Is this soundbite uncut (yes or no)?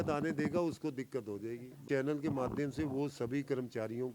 no